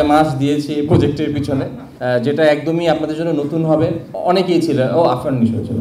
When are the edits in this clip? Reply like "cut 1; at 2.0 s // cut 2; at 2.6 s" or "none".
cut 1; at 1.8 s // cut 2; at 4.1 s